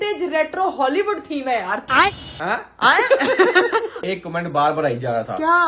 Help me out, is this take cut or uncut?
cut